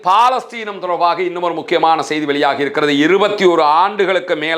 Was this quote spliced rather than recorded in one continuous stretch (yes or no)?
no